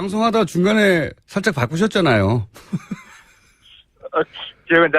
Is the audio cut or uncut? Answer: cut